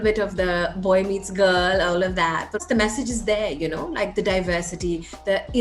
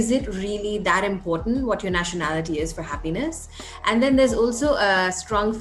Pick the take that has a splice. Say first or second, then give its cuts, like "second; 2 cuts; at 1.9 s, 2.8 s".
first; 1 cut; at 2.6 s